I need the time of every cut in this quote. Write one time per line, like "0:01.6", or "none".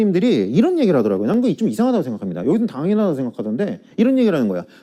none